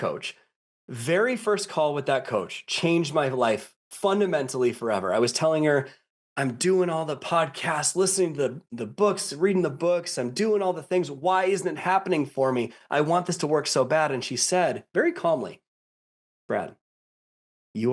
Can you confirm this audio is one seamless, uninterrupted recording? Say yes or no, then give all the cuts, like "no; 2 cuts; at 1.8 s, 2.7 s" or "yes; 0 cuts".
yes; 0 cuts